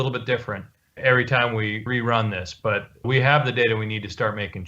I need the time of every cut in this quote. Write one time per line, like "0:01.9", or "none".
0:01.8